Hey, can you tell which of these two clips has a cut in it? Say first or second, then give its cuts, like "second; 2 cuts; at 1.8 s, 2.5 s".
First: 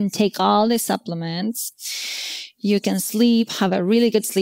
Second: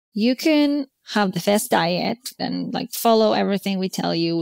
second; 2 cuts; at 0.9 s, 2.4 s